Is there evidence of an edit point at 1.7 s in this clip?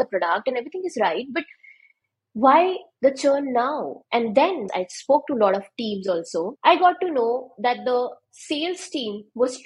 no; 2 cuts; at 4.6 s, 6.5 s

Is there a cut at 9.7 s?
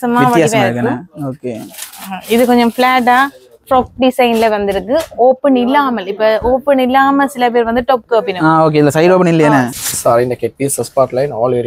yes; 1 cut; at 9.7 s

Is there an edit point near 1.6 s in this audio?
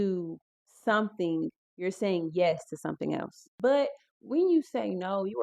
no; 1 cut; at 3.5 s

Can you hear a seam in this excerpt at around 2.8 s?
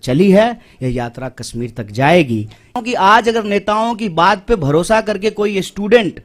yes; 1 cut; at 2.8 s

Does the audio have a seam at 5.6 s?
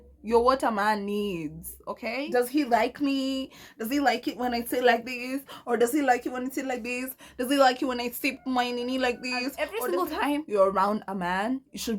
no; 2 cuts; at 2.3 s, 9.5 s

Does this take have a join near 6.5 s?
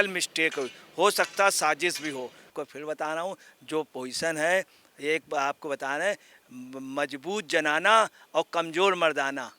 no; 1 cut; at 2.6 s

